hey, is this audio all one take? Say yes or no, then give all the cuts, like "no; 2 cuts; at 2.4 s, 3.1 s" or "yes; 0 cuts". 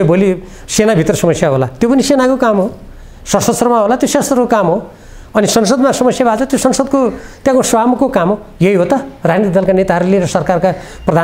yes; 0 cuts